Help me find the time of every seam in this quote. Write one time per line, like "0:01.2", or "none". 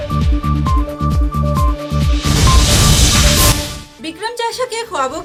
none

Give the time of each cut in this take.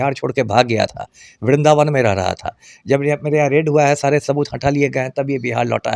none

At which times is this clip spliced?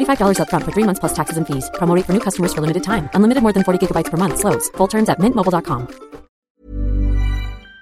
0:06.5

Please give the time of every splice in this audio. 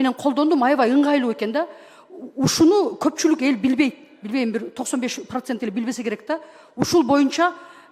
none

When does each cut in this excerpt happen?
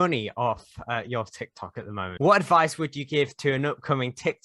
0:02.1

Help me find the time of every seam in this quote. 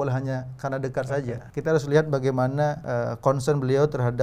0:01.4
0:02.8

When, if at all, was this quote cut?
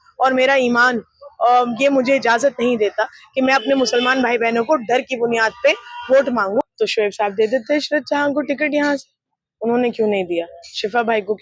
0:06.6

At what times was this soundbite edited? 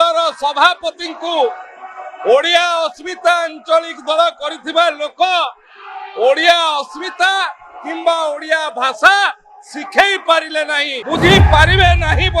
0:10.9

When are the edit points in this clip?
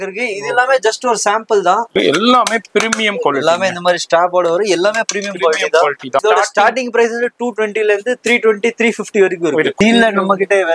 0:01.9
0:06.2
0:09.7

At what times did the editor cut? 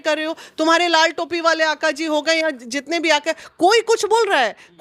none

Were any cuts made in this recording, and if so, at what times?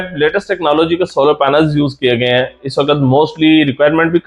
none

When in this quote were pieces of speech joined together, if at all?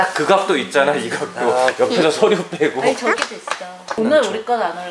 0:03.9

